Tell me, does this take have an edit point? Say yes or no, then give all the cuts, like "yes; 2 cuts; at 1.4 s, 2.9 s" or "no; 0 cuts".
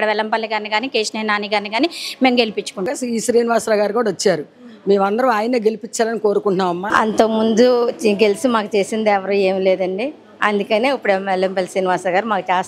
yes; 2 cuts; at 2.9 s, 6.9 s